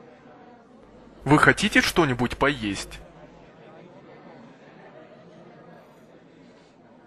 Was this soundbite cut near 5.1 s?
no; 2 cuts; at 1.2 s, 2.8 s

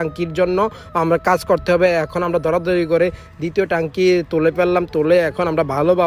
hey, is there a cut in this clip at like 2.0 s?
no; 0 cuts

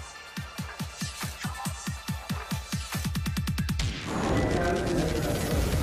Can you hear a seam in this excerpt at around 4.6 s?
yes; 1 cut; at 4.6 s

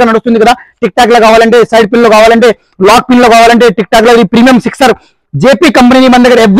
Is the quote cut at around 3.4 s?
no; 0 cuts

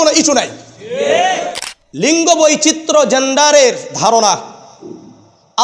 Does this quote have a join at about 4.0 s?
no; 1 cut; at 1.4 s

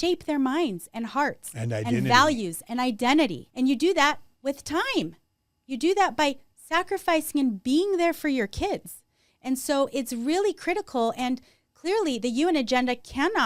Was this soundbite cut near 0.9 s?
no; 1 cut; at 3.4 s

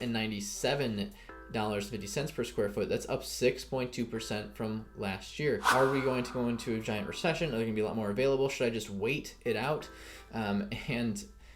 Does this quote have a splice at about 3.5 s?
no; 1 cut; at 5.7 s

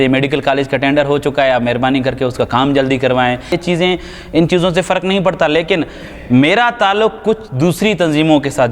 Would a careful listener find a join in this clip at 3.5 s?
yes; 1 cut; at 3.5 s

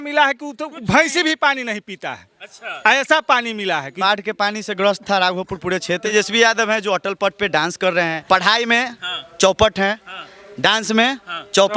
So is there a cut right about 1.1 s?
no; 3 cuts; at 3.9 s, 6.1 s, 8.2 s

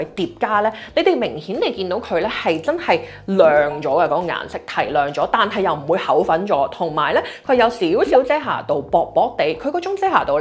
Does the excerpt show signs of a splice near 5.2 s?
no; 0 cuts

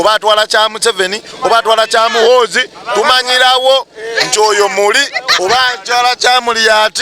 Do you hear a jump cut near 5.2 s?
yes; 1 cut; at 5.2 s

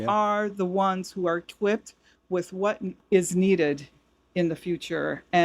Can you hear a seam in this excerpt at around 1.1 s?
no; 1 cut; at 2.9 s

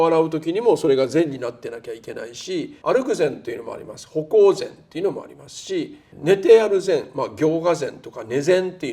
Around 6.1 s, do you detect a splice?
yes; 2 cuts; at 2.7 s, 6.1 s

